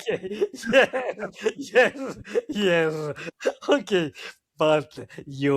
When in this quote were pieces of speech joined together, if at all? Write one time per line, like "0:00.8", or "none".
0:03.2